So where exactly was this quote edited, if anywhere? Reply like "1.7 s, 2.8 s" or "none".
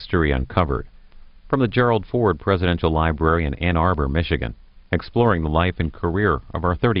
1.9 s